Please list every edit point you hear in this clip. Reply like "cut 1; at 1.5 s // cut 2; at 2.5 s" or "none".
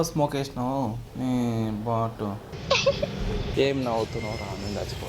cut 1; at 2.5 s // cut 2; at 3.5 s